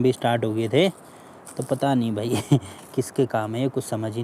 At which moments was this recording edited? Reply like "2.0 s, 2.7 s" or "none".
none

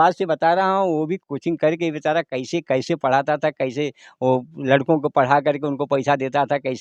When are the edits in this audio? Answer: none

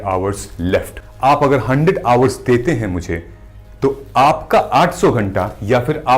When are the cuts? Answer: 1.0 s

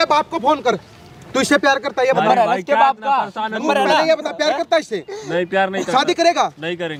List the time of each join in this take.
none

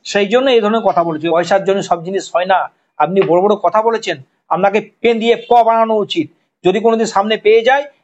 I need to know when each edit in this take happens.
1.3 s

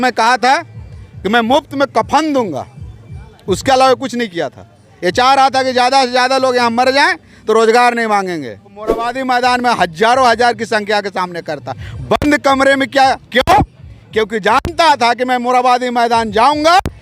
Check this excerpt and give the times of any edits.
9.1 s

